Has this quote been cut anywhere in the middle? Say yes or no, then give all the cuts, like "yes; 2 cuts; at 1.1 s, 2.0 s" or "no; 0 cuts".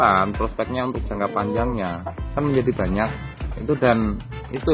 yes; 1 cut; at 2.2 s